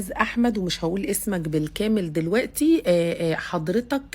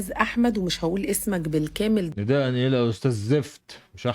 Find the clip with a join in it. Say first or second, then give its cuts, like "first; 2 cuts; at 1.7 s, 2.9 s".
second; 1 cut; at 2.1 s